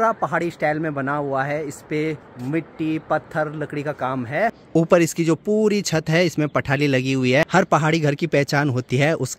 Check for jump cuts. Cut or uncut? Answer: uncut